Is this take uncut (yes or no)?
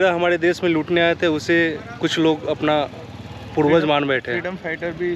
yes